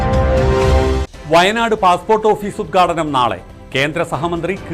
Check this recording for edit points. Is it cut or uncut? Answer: cut